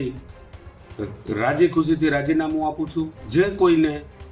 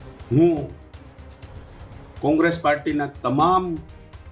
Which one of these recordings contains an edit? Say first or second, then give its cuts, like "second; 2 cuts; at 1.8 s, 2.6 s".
first; 1 cut; at 3.2 s